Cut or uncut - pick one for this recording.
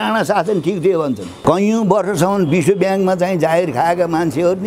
cut